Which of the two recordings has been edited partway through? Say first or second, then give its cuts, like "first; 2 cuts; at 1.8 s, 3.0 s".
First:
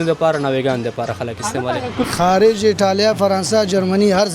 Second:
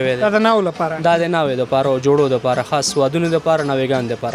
first; 1 cut; at 2.1 s